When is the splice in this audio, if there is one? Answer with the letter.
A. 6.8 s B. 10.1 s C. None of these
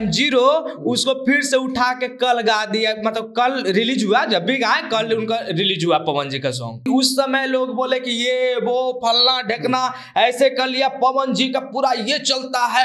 A